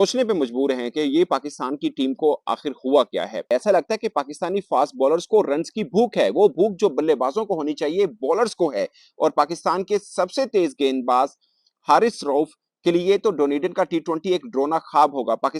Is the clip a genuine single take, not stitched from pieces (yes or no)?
yes